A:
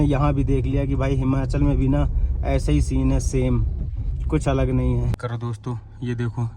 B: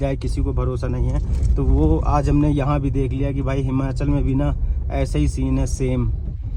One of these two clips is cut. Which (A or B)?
A